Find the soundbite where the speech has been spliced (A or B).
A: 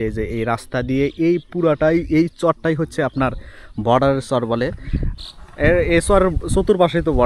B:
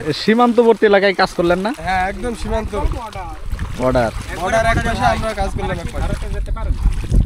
A